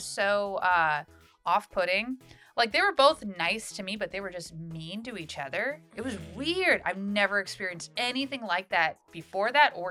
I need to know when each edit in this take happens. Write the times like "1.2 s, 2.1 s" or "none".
none